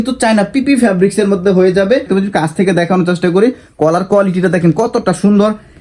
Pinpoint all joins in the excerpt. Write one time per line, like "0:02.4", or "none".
0:02.1